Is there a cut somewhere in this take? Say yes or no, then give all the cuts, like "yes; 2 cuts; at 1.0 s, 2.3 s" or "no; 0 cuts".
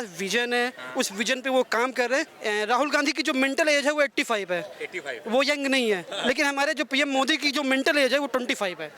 yes; 1 cut; at 2.3 s